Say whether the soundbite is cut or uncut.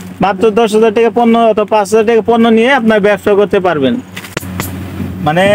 cut